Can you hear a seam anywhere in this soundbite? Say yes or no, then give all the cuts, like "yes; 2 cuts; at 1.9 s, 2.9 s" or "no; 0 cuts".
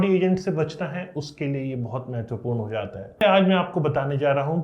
yes; 1 cut; at 3.2 s